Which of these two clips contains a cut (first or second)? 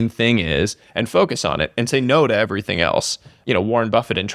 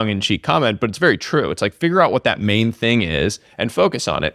first